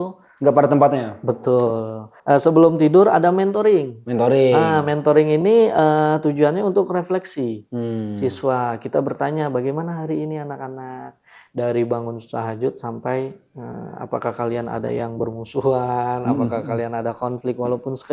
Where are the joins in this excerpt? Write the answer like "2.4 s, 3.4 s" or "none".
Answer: 2.1 s